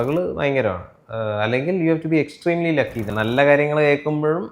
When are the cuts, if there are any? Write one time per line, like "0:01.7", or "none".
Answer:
0:03.1